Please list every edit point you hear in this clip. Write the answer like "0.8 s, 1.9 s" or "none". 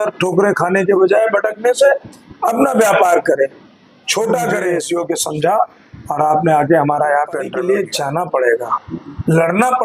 4.7 s, 7.6 s